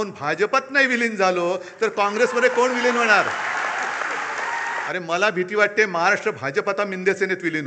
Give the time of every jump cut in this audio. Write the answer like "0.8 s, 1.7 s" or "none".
4.9 s